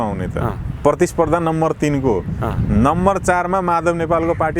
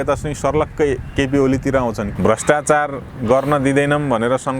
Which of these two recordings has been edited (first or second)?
second